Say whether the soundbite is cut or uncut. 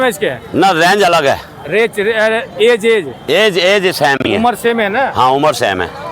uncut